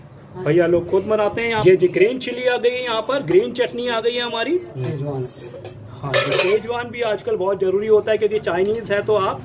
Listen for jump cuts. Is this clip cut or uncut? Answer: cut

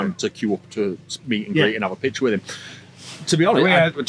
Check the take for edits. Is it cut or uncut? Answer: uncut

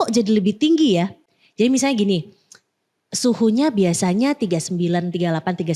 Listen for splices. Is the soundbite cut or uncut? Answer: uncut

